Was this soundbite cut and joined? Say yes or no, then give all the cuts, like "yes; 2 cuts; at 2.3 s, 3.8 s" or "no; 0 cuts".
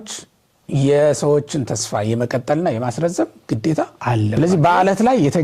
yes; 1 cut; at 4.3 s